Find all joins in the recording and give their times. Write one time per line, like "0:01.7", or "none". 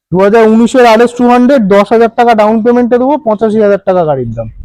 none